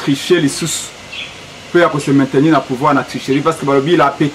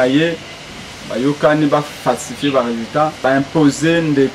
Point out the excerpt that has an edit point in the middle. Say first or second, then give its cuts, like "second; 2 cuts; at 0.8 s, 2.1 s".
second; 1 cut; at 3.2 s